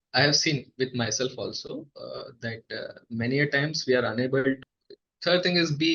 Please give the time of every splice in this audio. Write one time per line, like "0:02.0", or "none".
0:04.6